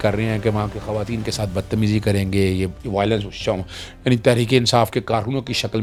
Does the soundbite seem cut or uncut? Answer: uncut